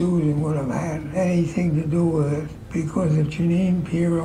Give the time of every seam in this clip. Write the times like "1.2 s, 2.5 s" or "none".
2.6 s

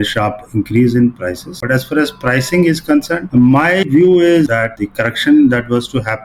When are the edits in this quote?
1.5 s

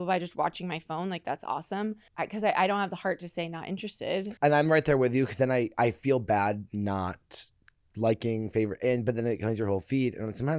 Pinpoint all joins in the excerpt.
2.1 s, 4.3 s

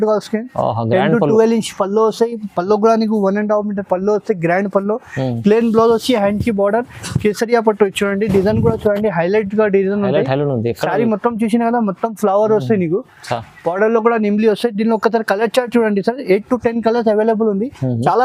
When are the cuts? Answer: none

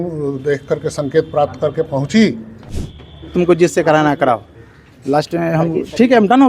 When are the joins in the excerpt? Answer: 2.8 s

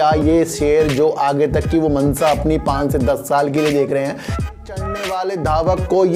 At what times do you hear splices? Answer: 4.5 s

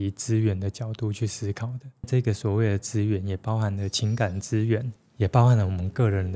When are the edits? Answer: 2.1 s

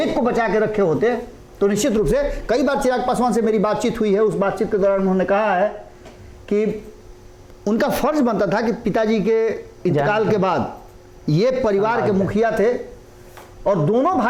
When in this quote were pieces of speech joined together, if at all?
none

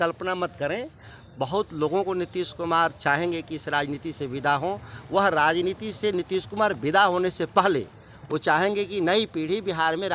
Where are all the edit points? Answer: none

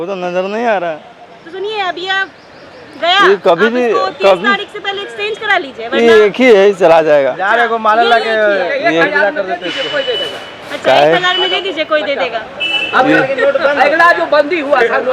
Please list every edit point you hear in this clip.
none

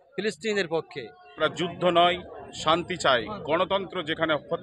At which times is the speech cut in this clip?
1.4 s

